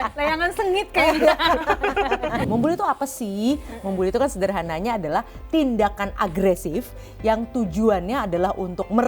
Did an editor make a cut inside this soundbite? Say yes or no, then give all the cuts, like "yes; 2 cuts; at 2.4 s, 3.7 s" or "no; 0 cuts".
yes; 1 cut; at 2.4 s